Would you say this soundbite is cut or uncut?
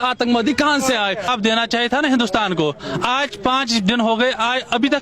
cut